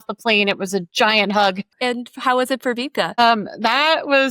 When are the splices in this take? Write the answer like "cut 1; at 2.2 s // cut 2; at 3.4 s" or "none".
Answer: cut 1; at 1.7 s